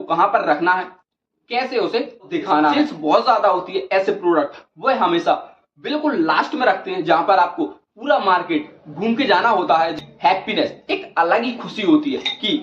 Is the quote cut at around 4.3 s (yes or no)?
no